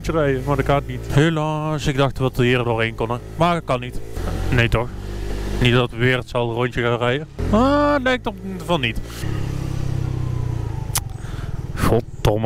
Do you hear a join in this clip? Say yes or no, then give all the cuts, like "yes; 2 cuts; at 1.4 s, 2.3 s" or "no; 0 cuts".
no; 0 cuts